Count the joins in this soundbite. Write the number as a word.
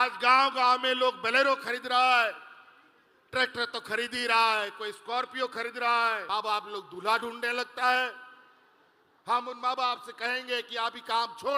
one